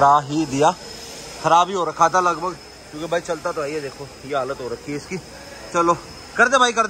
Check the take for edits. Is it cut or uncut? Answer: uncut